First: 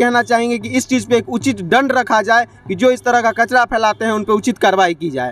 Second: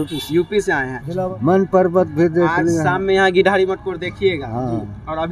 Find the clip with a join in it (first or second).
second